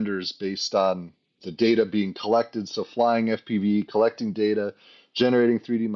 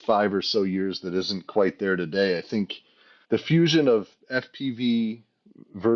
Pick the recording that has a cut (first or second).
second